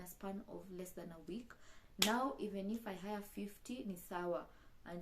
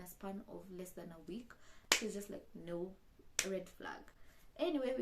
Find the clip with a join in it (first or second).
first